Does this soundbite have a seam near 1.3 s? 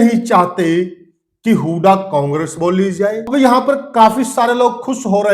no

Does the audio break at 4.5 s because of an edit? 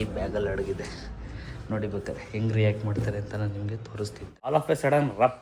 yes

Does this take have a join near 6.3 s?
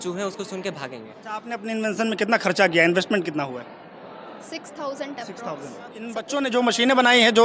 yes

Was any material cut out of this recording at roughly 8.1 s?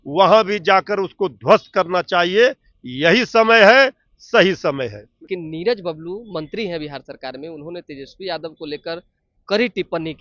no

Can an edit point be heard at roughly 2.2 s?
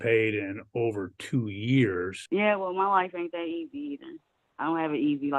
yes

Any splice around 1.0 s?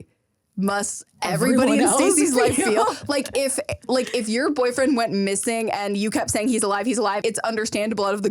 no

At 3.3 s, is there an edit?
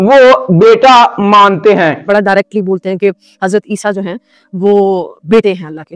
no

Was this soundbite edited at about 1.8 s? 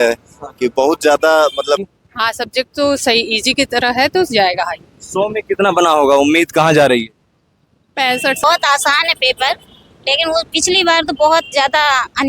yes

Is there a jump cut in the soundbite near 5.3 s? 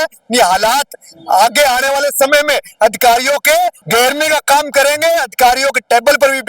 no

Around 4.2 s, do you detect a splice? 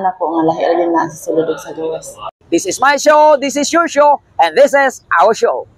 no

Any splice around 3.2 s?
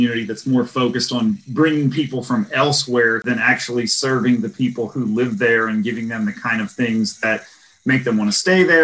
yes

